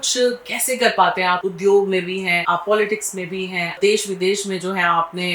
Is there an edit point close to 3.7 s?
yes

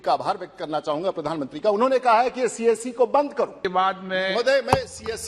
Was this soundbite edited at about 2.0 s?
no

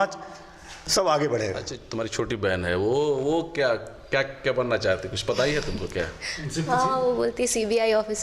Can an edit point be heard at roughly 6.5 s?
no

